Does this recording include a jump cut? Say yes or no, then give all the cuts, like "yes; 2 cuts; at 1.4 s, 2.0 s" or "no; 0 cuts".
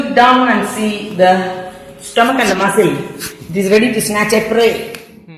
no; 0 cuts